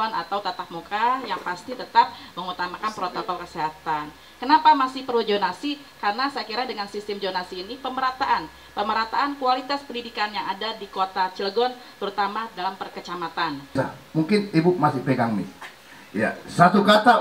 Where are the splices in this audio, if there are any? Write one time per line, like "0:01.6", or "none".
0:13.8